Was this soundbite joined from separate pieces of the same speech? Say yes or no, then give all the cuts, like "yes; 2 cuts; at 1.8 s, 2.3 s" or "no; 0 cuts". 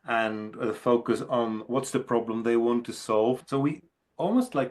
yes; 1 cut; at 3.4 s